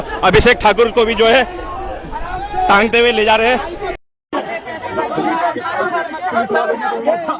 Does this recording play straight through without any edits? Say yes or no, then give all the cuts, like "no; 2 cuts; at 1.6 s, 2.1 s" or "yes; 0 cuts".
no; 1 cut; at 4.0 s